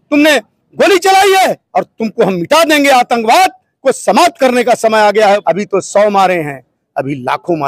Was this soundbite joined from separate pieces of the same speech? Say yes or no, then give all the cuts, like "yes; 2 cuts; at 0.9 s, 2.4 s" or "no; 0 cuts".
yes; 2 cuts; at 1.6 s, 5.4 s